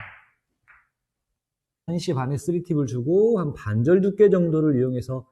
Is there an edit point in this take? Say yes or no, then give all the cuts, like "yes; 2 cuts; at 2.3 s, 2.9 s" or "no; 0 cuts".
yes; 1 cut; at 1.8 s